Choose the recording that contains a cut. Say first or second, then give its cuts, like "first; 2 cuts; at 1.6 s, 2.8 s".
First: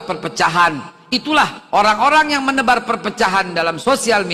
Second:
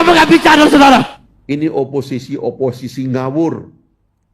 second; 1 cut; at 1.1 s